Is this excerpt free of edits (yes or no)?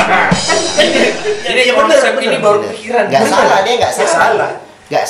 yes